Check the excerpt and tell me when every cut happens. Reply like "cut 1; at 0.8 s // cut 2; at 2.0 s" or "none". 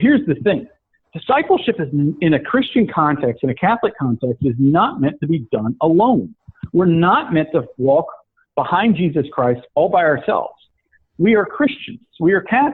none